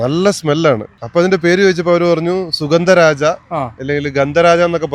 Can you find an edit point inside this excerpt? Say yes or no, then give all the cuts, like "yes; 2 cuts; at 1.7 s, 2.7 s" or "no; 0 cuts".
yes; 1 cut; at 1.0 s